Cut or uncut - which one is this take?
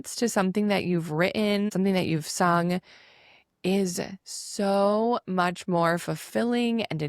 cut